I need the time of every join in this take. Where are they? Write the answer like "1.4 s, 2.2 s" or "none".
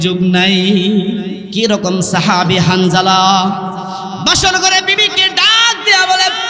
1.4 s